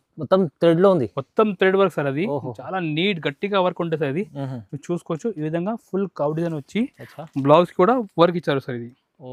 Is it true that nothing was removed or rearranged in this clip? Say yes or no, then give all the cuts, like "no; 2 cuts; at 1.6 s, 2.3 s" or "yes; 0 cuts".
yes; 0 cuts